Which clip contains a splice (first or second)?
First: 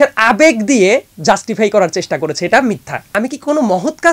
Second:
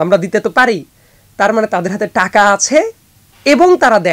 first